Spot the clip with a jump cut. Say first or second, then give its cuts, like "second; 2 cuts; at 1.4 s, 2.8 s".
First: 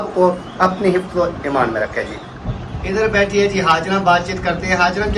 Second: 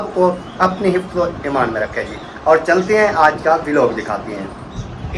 first; 1 cut; at 2.3 s